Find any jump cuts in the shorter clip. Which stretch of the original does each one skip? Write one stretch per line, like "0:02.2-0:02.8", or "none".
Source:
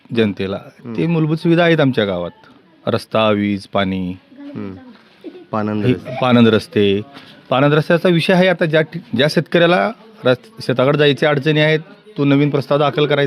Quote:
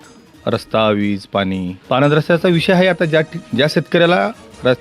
0:04.1-0:07.3